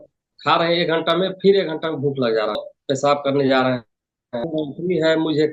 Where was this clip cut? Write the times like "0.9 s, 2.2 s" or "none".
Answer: 2.7 s, 4.4 s